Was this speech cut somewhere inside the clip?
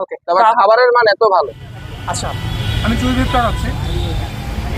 no; 0 cuts

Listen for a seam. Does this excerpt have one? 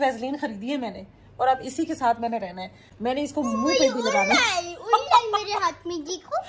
no; 0 cuts

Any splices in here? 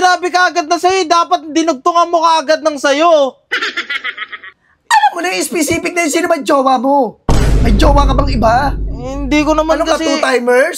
no; 0 cuts

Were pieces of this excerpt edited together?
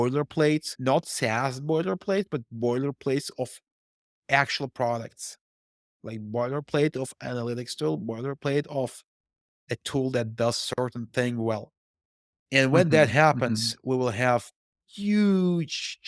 no; 0 cuts

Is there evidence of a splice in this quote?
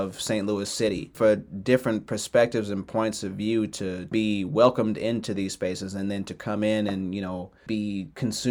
yes; 3 cuts; at 1.1 s, 4.1 s, 7.7 s

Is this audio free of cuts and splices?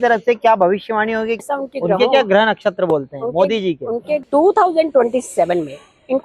no; 2 cuts; at 1.4 s, 4.2 s

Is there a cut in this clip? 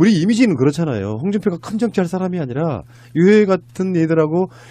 yes; 1 cut; at 3.2 s

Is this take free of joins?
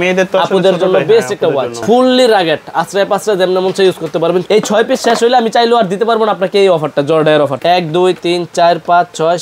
no; 3 cuts; at 1.8 s, 4.4 s, 7.6 s

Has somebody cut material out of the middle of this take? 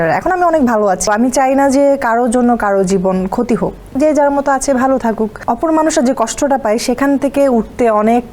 yes; 3 cuts; at 1.1 s, 3.8 s, 5.4 s

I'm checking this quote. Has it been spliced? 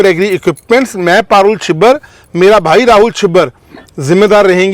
no; 0 cuts

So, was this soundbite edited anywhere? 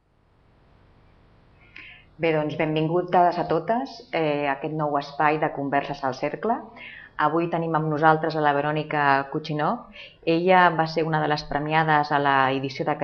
no; 0 cuts

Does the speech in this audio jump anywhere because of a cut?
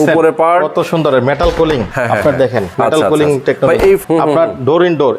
yes; 3 cuts; at 1.9 s, 2.7 s, 4.0 s

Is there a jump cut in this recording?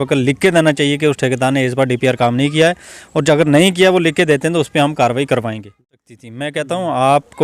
yes; 1 cut; at 6.2 s

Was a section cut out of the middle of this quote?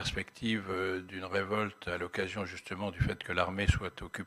no; 0 cuts

